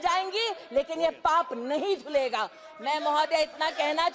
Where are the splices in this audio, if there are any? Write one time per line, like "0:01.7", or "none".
none